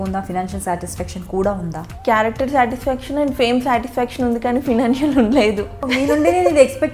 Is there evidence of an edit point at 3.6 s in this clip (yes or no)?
no